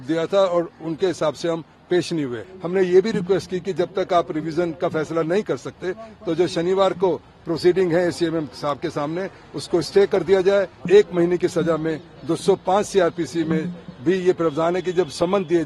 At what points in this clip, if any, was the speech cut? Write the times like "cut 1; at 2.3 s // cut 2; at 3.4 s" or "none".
cut 1; at 2.5 s // cut 2; at 10.8 s

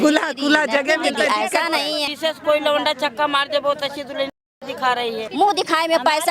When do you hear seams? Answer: cut 1; at 2.0 s // cut 2; at 5.3 s

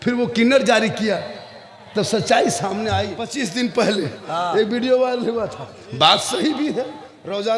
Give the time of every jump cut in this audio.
cut 1; at 3.2 s

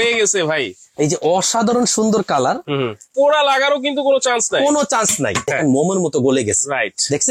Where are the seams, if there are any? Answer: cut 1; at 3.1 s // cut 2; at 5.5 s

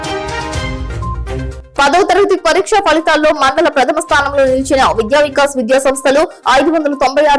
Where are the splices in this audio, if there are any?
cut 1; at 1.2 s

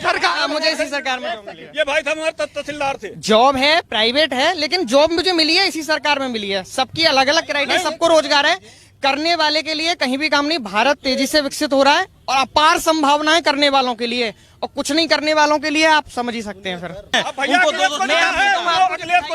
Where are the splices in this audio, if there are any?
cut 1; at 17.1 s

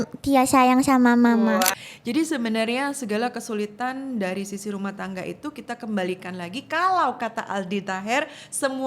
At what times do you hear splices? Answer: cut 1; at 1.8 s

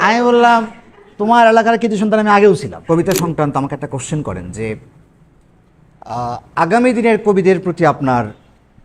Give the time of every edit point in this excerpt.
cut 1; at 2.7 s

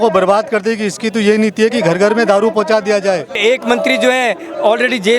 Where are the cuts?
cut 1; at 3.4 s

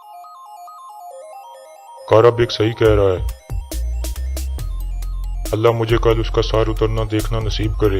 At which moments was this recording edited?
none

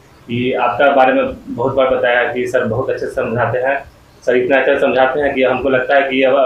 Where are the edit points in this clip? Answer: none

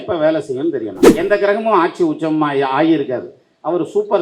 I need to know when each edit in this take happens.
cut 1; at 1.0 s

